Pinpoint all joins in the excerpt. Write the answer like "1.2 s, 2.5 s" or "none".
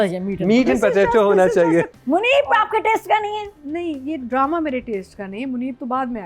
2.0 s